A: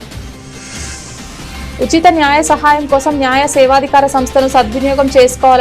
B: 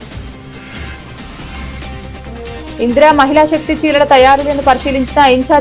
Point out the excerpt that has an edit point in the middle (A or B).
A